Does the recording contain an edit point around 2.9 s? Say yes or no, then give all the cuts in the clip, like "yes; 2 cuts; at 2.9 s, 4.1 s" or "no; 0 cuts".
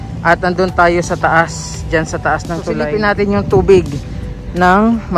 yes; 1 cut; at 2.9 s